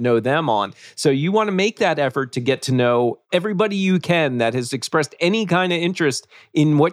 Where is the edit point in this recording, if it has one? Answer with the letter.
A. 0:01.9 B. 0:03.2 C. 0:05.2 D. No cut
B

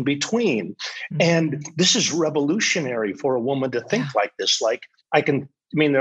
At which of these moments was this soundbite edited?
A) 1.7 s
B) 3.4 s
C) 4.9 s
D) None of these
C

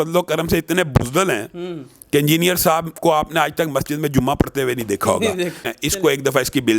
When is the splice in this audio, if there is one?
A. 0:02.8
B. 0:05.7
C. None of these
B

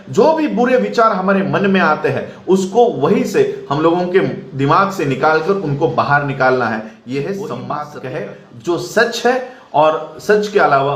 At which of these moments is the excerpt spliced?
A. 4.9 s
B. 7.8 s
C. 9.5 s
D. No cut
B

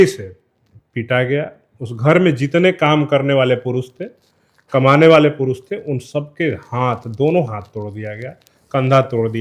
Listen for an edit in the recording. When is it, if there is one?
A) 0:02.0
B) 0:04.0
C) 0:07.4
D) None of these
D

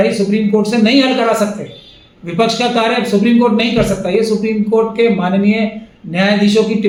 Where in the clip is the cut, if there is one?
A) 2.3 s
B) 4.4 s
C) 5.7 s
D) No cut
D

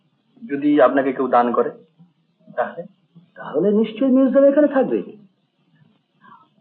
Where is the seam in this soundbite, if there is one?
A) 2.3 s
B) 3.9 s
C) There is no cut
C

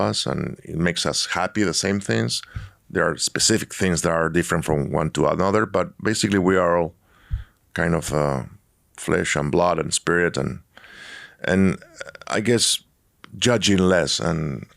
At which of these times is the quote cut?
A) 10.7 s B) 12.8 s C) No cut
C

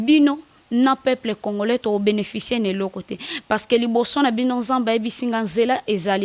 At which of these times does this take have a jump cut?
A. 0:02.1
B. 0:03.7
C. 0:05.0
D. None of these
D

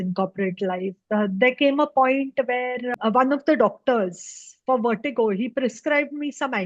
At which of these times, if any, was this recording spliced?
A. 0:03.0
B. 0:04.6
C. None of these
A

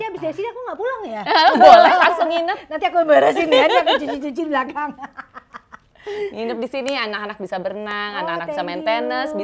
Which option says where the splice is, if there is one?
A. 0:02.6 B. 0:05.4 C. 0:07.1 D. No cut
D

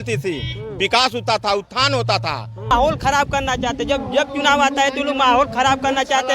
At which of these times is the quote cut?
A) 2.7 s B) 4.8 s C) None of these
A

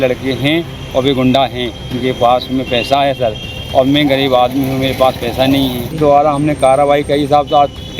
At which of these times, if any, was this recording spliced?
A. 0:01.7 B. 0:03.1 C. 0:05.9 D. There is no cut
C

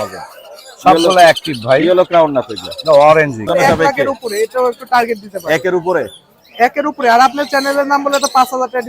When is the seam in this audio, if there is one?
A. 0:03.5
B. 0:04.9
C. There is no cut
A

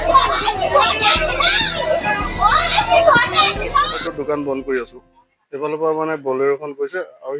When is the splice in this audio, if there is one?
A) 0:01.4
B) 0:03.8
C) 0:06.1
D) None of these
B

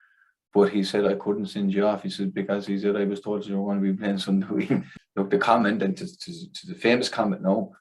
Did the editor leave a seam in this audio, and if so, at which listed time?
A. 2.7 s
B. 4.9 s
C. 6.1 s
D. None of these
B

